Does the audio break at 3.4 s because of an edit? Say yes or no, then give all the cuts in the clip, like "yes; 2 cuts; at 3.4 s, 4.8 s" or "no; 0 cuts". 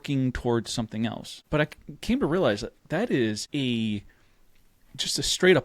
yes; 2 cuts; at 1.3 s, 3.4 s